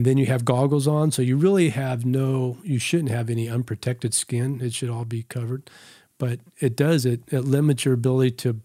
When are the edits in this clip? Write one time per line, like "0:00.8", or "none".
none